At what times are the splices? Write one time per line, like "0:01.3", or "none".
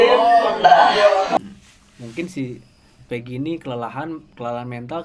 0:01.4